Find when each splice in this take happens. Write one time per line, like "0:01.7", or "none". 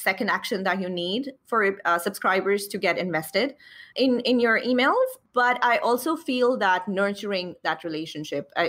0:03.9
0:05.2